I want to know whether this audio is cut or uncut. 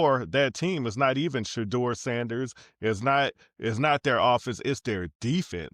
uncut